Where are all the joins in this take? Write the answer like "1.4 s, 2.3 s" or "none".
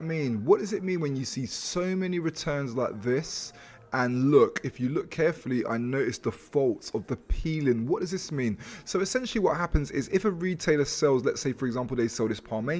none

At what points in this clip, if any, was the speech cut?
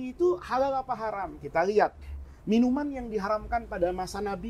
1.1 s

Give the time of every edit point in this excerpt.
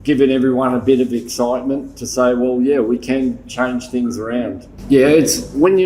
4.7 s

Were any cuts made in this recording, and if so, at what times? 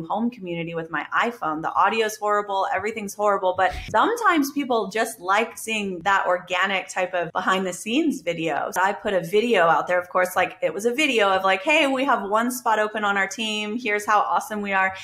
3.8 s, 6.0 s, 7.3 s, 8.8 s

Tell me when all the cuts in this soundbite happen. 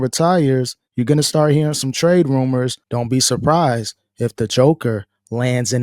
2.9 s

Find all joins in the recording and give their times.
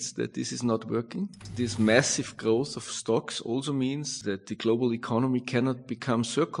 1.4 s, 4.1 s

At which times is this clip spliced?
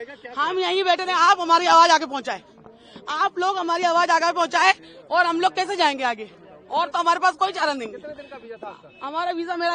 none

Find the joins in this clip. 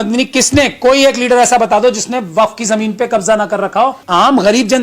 3.8 s

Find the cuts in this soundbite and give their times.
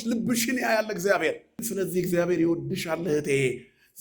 1.6 s

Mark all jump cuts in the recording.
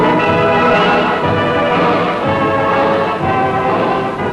2.9 s

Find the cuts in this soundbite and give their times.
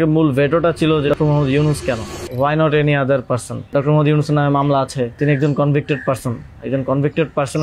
1.1 s, 2.2 s, 3.7 s, 5.2 s

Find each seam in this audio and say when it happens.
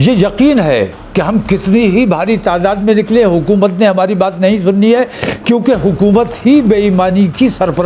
none

